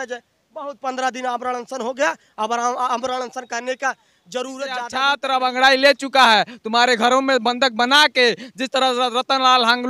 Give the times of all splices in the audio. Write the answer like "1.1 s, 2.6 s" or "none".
4.9 s